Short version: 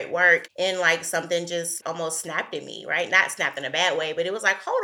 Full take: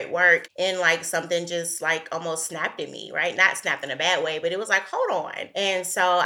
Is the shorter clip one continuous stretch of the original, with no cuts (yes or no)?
no